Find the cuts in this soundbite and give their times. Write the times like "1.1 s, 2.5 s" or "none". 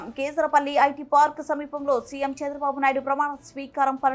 none

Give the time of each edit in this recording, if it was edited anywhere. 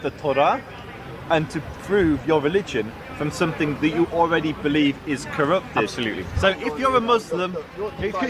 none

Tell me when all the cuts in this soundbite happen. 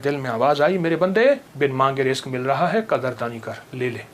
1.5 s

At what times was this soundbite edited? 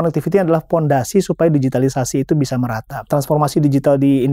3.1 s

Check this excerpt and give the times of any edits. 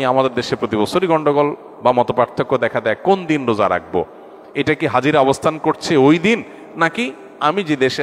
none

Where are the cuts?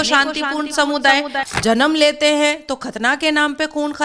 1.3 s

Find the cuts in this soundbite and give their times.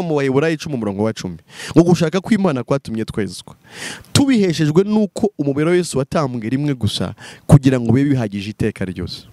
none

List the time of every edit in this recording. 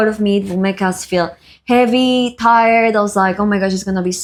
none

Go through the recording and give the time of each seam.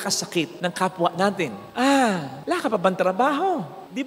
1.6 s

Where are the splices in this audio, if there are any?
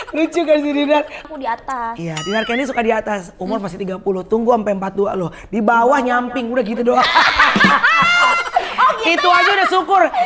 1.2 s

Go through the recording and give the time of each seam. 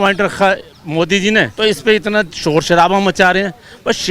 1.5 s

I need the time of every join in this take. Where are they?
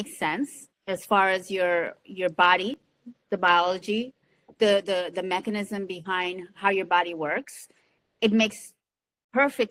none

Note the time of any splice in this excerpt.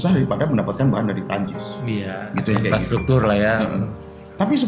none

